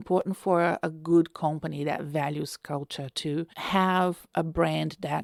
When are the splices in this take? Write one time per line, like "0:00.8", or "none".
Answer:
none